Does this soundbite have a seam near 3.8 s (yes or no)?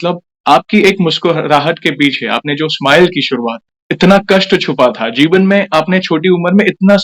no